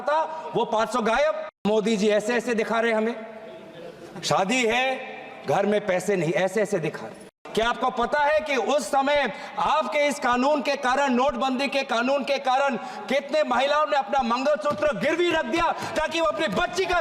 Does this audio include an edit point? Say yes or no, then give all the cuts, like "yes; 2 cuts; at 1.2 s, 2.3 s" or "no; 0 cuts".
yes; 2 cuts; at 1.6 s, 7.4 s